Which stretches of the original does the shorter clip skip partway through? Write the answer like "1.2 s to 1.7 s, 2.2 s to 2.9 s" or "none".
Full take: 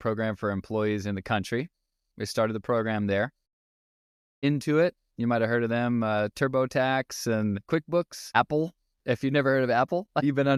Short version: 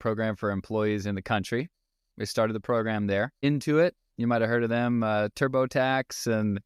3.3 s to 4.3 s